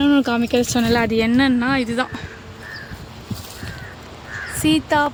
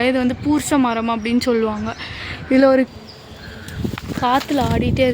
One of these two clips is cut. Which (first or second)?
second